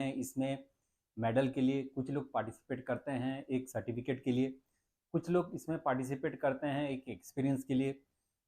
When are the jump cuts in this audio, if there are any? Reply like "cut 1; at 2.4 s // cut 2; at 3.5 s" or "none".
none